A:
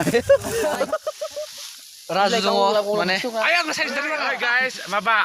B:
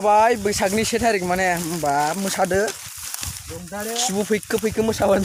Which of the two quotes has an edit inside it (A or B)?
A